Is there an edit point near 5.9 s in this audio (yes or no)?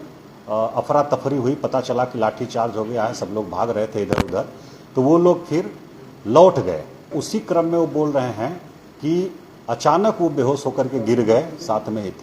no